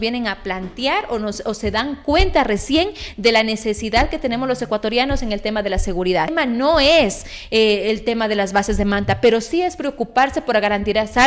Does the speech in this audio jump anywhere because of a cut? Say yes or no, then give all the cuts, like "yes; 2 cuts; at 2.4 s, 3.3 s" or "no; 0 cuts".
yes; 1 cut; at 6.3 s